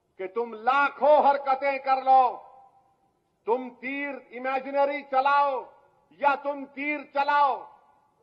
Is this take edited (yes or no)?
no